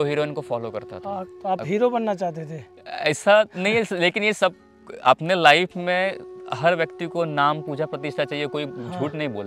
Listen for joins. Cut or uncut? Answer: cut